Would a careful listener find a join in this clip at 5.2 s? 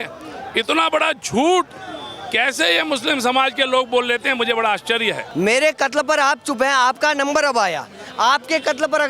yes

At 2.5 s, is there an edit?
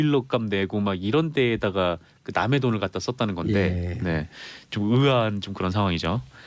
yes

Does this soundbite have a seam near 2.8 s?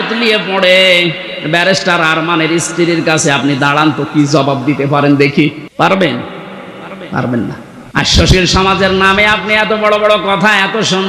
no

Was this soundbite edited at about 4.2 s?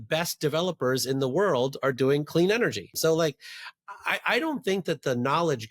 no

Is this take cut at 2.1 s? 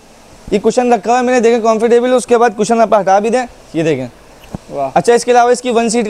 no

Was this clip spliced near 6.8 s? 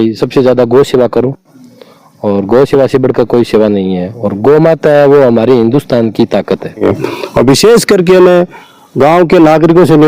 yes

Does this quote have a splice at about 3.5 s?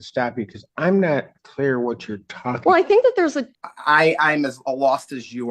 yes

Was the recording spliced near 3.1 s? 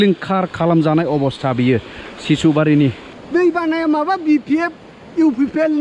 yes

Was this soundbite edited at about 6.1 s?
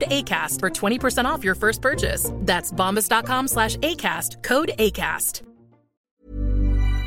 yes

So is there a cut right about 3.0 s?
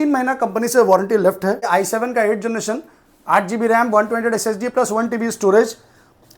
no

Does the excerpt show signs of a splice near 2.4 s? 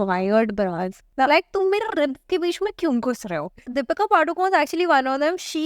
no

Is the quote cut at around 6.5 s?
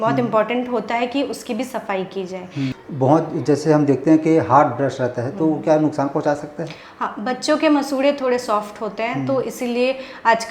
no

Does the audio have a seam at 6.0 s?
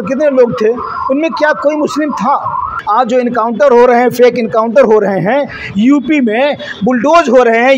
no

